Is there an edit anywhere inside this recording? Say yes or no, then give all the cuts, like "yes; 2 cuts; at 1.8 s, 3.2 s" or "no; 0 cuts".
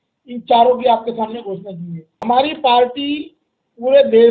yes; 1 cut; at 2.2 s